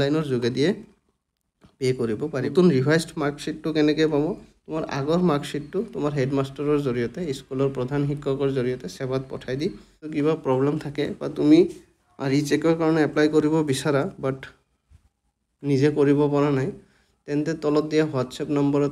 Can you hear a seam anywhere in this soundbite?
yes; 2 cuts; at 2.5 s, 10.0 s

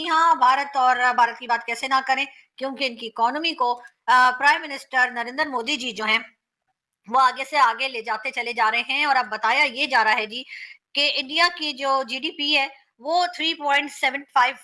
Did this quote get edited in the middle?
no; 0 cuts

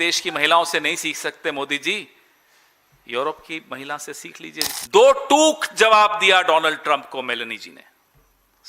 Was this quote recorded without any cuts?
no; 1 cut; at 4.7 s

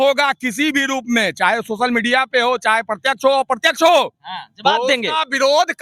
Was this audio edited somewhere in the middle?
no; 0 cuts

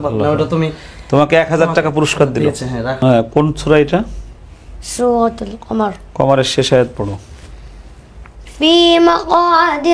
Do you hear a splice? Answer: yes; 1 cut; at 2.9 s

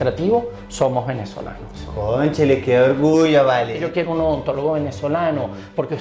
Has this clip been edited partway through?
yes; 1 cut; at 3.8 s

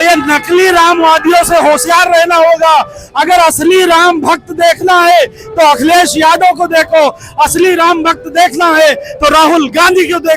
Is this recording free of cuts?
yes; 0 cuts

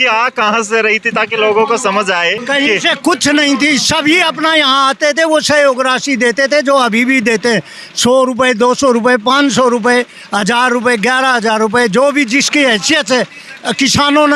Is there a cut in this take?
no; 0 cuts

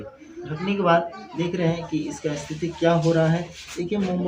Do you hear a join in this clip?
no; 0 cuts

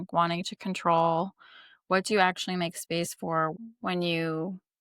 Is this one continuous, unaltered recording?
no; 1 cut; at 3.5 s

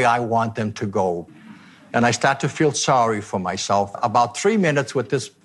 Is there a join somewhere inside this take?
yes; 2 cuts; at 1.3 s, 3.9 s

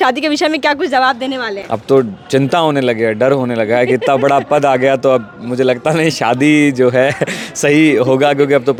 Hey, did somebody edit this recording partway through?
no; 0 cuts

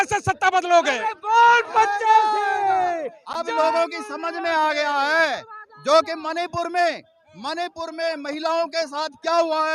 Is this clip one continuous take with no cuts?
yes; 0 cuts

